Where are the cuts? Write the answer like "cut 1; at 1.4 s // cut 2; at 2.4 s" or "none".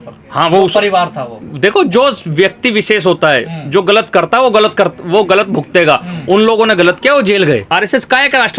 cut 1; at 7.6 s